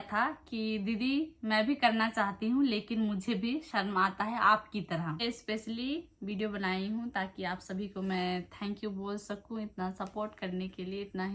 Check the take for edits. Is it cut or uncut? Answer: cut